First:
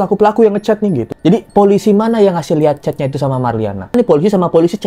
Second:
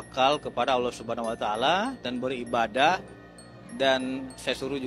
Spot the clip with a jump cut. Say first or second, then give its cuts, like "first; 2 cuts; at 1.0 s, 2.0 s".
first; 2 cuts; at 1.1 s, 3.9 s